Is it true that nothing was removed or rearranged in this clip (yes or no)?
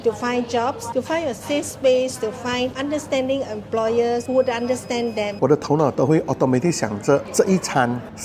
no